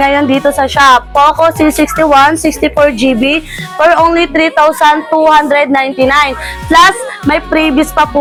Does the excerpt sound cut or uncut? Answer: uncut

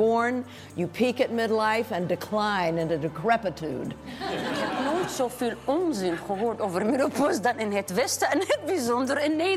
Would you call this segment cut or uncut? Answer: cut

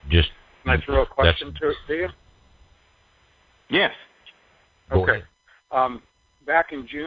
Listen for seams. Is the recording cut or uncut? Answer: uncut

